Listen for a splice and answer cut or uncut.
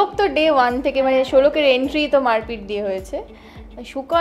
uncut